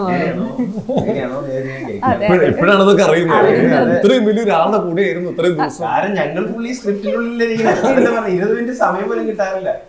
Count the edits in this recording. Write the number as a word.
zero